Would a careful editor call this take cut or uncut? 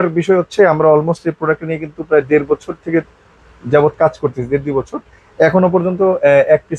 uncut